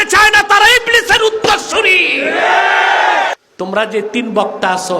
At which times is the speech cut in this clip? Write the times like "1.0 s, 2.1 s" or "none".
3.3 s